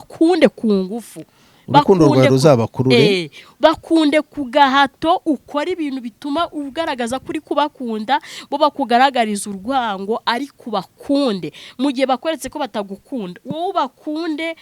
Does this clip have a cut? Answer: no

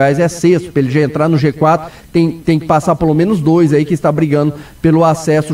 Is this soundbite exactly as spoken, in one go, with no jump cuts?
yes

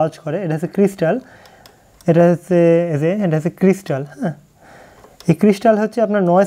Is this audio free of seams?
yes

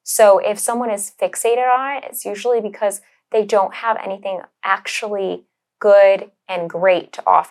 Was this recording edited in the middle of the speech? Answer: no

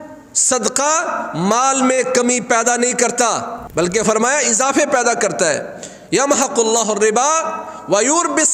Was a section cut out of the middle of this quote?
yes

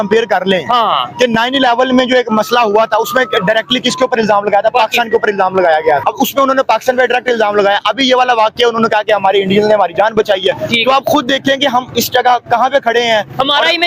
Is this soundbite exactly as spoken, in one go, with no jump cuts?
no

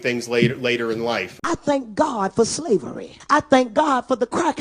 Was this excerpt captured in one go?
no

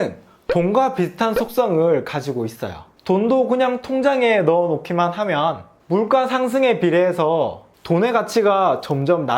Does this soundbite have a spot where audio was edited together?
no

